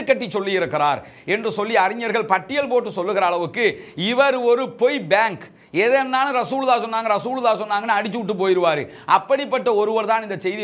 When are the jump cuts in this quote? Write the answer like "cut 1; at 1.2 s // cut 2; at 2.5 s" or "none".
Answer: none